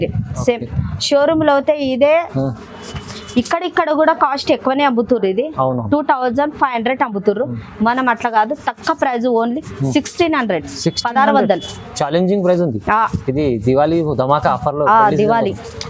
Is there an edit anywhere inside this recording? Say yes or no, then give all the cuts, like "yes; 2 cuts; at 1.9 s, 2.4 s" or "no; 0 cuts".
no; 0 cuts